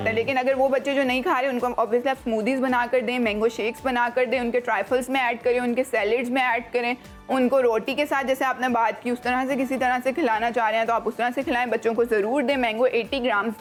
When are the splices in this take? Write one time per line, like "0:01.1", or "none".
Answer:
none

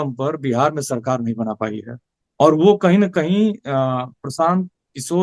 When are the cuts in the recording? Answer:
none

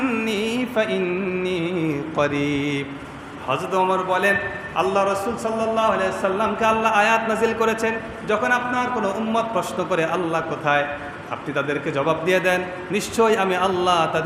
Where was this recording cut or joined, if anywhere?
none

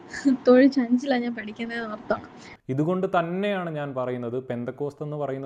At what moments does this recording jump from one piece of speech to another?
0:02.5

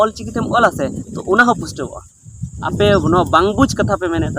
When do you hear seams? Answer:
0:02.7

